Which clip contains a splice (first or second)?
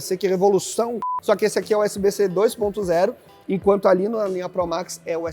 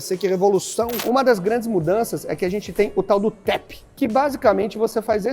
second